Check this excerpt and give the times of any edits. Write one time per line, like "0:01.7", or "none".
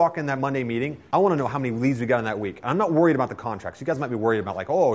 0:01.0

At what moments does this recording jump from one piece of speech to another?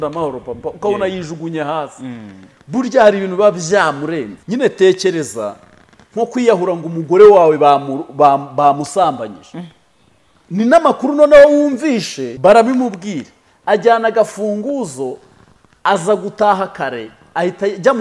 0:04.4
0:12.2

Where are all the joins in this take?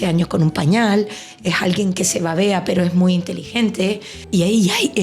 0:04.1

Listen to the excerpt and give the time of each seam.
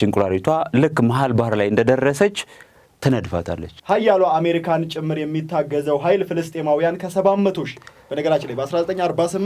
0:03.7

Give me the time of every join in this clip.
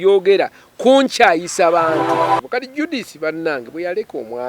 0:02.4

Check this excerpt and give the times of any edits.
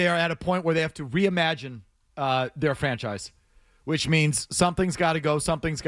none

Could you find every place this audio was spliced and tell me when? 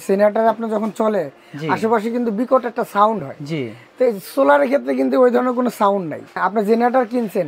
0:06.4

